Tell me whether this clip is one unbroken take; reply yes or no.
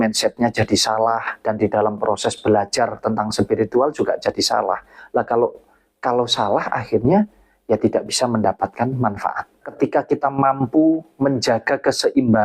no